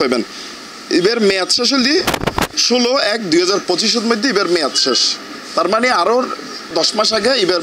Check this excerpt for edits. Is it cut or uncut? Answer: cut